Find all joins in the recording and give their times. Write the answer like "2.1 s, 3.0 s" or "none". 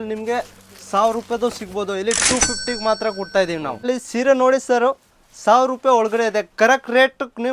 3.7 s